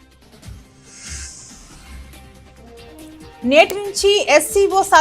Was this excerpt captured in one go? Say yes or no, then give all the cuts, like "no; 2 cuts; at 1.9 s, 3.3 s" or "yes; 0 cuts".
yes; 0 cuts